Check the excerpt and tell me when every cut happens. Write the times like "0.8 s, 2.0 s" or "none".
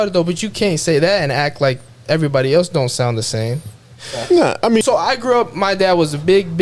4.8 s